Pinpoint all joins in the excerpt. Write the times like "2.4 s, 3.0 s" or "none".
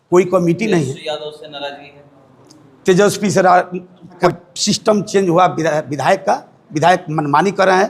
4.2 s